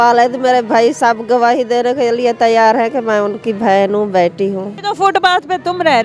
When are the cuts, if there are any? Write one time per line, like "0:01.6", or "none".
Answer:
0:04.7